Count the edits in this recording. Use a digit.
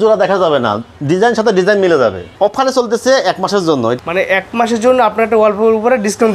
2